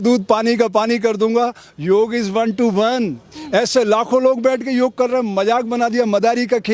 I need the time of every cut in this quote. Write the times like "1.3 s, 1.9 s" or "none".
none